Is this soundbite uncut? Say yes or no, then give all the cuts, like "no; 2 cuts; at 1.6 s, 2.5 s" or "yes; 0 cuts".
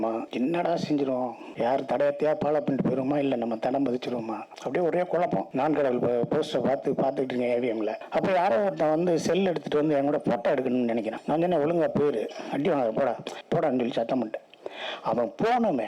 no; 3 cuts; at 8.0 s, 11.2 s, 13.3 s